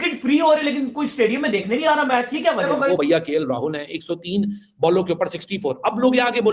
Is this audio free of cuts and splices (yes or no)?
no